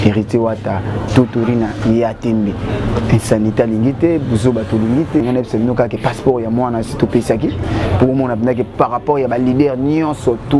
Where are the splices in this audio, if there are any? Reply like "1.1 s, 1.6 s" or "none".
5.2 s